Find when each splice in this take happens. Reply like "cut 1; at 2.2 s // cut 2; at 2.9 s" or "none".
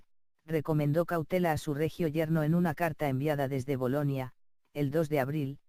cut 1; at 4.1 s